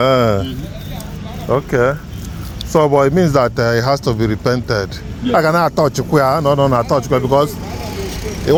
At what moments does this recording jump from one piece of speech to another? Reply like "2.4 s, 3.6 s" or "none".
none